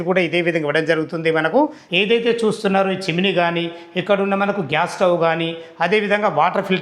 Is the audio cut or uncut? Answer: cut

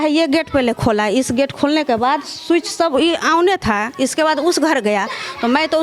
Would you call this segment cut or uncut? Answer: uncut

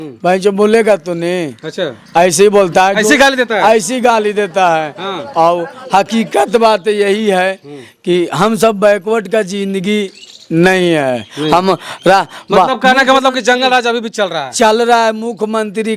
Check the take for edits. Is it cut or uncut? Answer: uncut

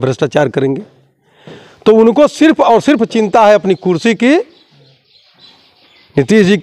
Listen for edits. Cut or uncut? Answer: uncut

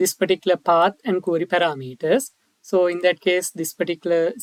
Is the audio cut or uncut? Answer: uncut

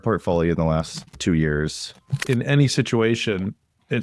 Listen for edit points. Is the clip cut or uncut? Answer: cut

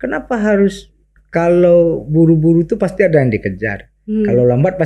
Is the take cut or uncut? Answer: uncut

